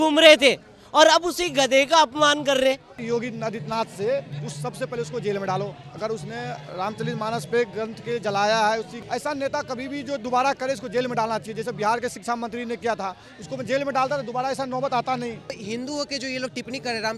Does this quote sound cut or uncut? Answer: cut